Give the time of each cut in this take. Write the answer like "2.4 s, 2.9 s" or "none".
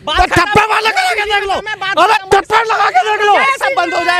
none

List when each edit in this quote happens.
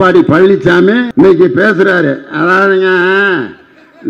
1.1 s

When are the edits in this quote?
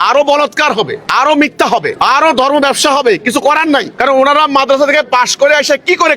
1.0 s, 1.9 s, 3.9 s

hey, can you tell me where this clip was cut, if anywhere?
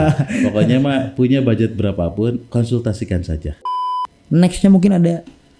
3.6 s

